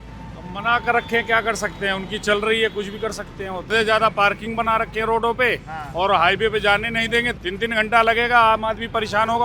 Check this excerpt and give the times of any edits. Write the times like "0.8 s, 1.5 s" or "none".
3.7 s, 7.4 s